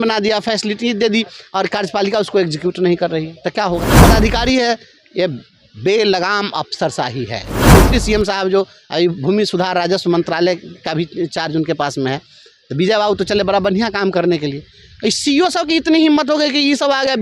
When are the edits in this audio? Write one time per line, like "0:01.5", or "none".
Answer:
0:04.0
0:07.5